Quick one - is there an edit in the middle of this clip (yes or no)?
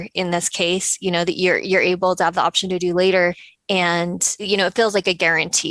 yes